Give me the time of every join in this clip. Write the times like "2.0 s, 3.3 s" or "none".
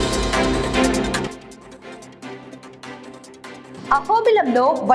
1.3 s, 3.7 s